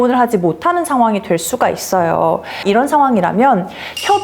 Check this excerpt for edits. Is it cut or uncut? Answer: cut